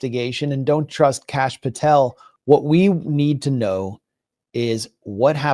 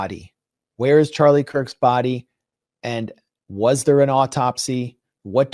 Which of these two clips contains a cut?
first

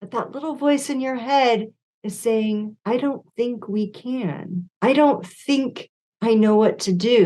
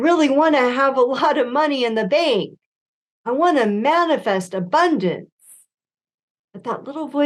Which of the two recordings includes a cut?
first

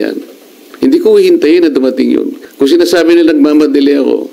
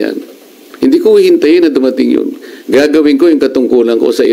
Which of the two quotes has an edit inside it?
first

